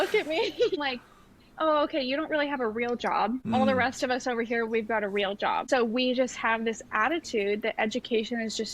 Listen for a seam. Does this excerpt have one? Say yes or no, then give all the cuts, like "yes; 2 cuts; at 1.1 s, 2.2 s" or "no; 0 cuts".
yes; 3 cuts; at 0.8 s, 3.6 s, 5.7 s